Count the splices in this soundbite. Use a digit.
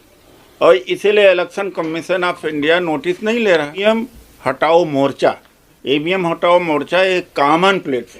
1